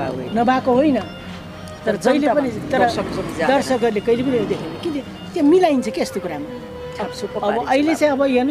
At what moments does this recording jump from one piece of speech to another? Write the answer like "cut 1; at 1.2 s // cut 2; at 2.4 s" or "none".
none